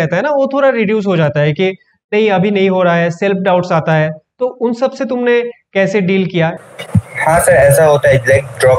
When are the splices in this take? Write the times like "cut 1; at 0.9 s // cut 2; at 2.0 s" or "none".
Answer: cut 1; at 6.6 s